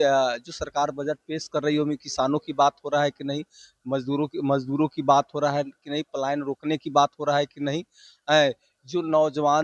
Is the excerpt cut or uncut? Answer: uncut